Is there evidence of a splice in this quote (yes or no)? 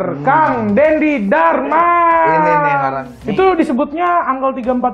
yes